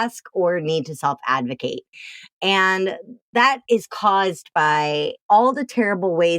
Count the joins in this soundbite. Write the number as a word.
one